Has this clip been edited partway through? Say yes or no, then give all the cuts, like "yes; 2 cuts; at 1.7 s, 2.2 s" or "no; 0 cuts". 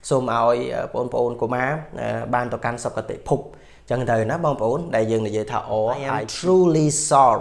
yes; 1 cut; at 6.3 s